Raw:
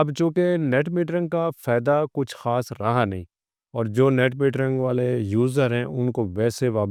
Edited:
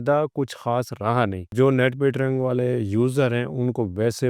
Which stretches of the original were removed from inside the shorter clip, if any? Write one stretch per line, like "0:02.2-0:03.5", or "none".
0:03.3-0:03.9